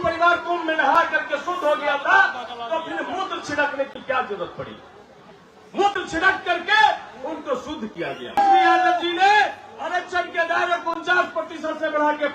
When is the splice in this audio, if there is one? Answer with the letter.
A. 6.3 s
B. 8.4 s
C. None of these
B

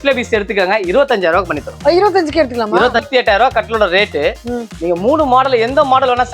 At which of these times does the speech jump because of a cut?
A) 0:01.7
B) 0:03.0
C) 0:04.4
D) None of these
B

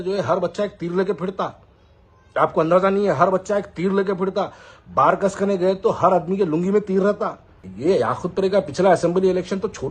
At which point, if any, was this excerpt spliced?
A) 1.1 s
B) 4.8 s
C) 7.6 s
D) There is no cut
C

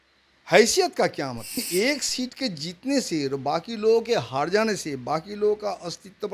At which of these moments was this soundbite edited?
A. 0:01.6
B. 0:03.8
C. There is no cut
A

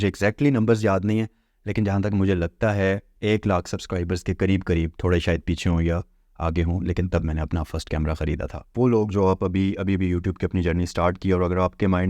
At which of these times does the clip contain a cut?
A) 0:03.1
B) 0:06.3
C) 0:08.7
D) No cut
C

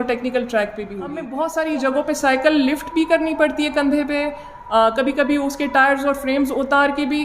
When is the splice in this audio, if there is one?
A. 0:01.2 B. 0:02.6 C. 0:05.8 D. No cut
A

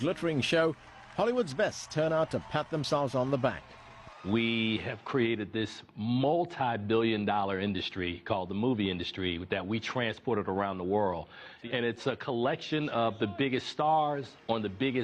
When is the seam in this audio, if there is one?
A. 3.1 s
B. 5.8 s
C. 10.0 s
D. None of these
A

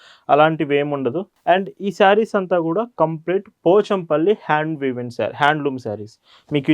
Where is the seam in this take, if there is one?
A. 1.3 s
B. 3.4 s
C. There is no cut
A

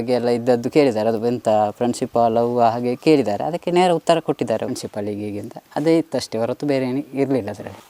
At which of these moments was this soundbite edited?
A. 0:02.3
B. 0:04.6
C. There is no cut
B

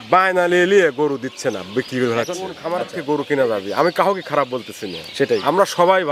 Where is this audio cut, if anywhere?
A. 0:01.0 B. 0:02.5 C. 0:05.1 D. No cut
B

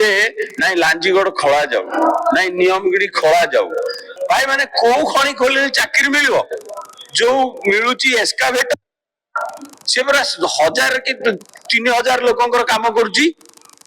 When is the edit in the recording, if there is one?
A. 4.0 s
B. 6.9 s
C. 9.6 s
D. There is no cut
A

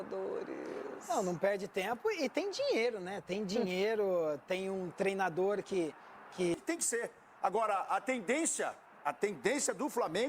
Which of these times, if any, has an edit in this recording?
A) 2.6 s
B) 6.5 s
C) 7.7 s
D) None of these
B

